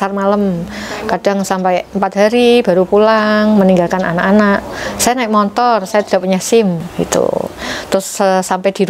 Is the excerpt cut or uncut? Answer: cut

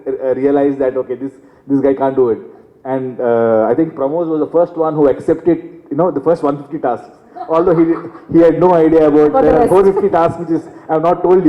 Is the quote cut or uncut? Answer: uncut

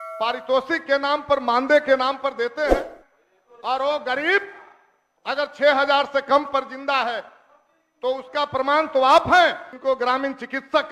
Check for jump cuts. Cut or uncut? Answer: cut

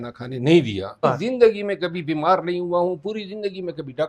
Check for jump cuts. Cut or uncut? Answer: cut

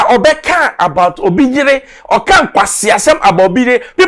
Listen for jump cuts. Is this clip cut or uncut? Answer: uncut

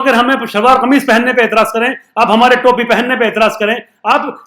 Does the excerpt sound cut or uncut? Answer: uncut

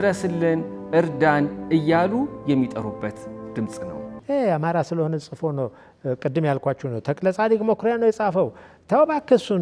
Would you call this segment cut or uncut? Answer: cut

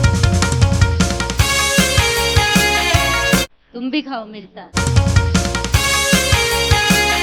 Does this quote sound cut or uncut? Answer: cut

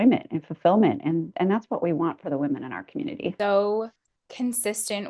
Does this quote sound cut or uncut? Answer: uncut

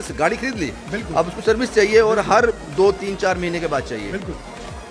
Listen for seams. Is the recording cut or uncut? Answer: uncut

